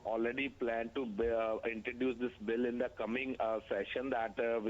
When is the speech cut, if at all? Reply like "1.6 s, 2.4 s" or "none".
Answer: 2.8 s

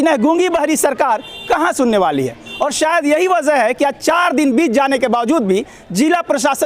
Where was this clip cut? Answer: none

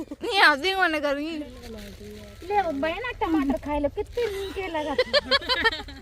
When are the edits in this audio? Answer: 1.6 s

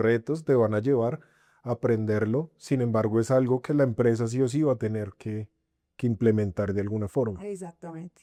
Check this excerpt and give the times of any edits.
none

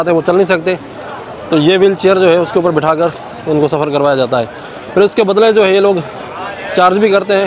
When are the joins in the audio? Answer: none

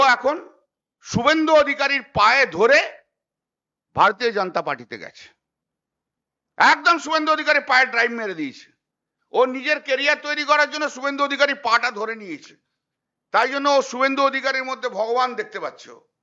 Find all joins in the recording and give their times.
none

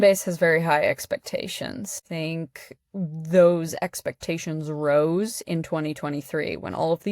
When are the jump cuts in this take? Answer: 2.1 s

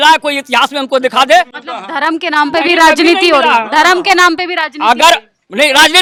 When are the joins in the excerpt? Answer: none

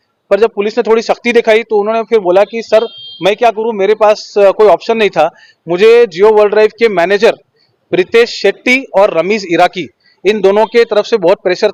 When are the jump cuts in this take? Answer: none

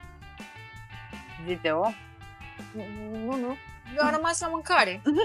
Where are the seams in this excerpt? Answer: none

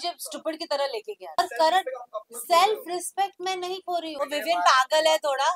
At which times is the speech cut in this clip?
1.4 s, 4.1 s

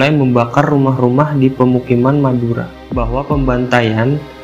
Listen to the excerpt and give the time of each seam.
2.8 s

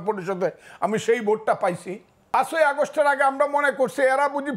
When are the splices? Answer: 2.3 s

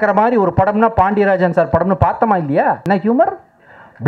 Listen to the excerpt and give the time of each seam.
2.8 s

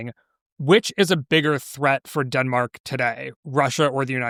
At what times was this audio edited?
none

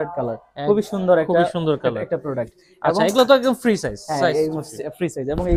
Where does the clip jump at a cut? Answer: none

